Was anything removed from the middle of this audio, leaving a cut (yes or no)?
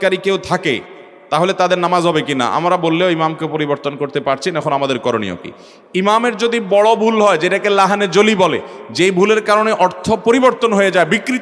no